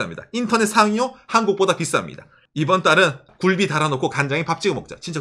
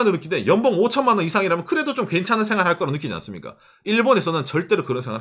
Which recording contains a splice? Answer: first; 2 cuts; at 2.4 s, 3.3 s

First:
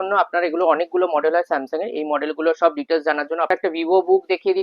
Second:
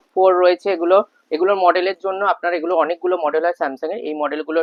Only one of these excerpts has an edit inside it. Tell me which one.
first; 1 cut; at 3.5 s

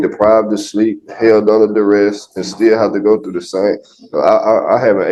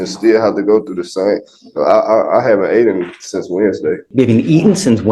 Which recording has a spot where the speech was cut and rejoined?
second; 1 cut; at 4.0 s

